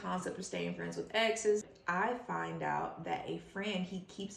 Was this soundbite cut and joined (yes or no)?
yes